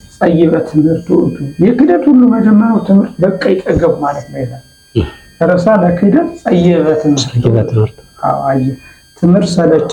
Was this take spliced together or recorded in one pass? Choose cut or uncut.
uncut